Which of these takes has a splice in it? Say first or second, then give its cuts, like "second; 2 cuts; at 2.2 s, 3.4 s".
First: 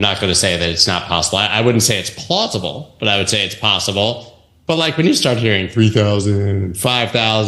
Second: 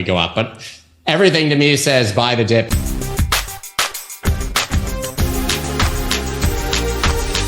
second; 1 cut; at 2.7 s